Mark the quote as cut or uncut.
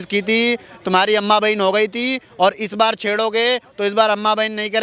uncut